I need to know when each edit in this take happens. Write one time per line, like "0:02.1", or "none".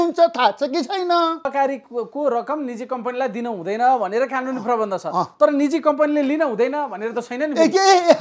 0:01.5